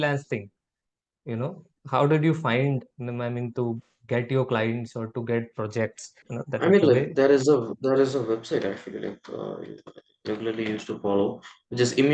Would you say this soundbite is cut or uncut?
cut